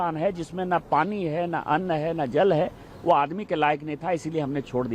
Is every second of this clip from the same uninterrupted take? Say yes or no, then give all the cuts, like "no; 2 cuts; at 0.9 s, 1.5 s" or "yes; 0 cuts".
yes; 0 cuts